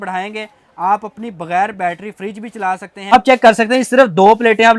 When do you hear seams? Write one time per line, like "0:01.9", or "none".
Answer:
0:03.1